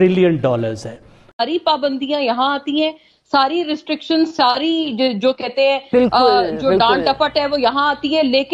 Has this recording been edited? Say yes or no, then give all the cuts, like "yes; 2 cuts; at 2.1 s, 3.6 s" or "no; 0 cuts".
yes; 1 cut; at 1.4 s